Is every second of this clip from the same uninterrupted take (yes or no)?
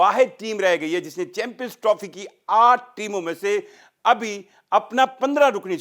yes